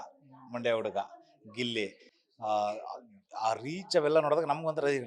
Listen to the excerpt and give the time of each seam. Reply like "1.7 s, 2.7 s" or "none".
none